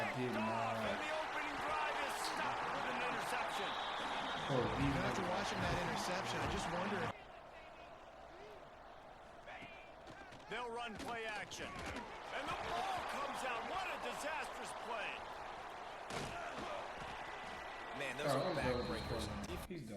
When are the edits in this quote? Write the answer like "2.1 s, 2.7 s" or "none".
7.1 s